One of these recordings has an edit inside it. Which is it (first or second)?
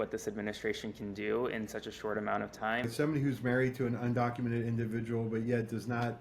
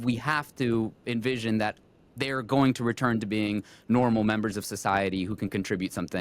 first